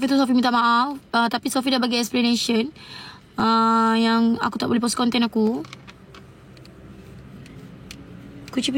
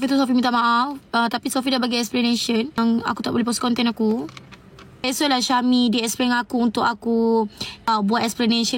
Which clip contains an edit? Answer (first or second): second